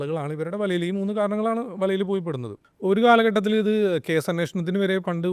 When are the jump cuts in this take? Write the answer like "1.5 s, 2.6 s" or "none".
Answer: 2.7 s